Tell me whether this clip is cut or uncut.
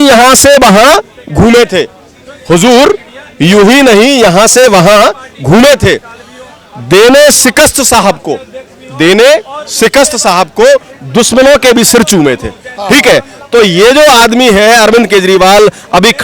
uncut